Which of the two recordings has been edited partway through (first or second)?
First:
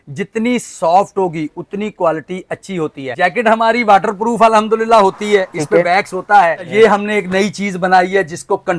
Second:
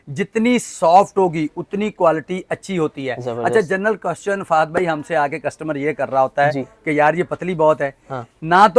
first